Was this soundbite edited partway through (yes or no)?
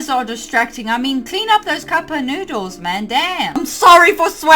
yes